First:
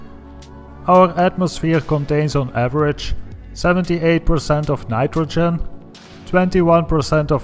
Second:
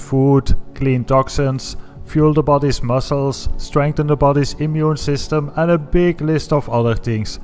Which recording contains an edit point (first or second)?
second